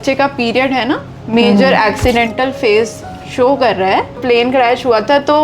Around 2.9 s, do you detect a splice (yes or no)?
no